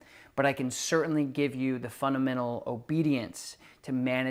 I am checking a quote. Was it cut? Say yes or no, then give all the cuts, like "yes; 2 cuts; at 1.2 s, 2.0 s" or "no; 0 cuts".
no; 0 cuts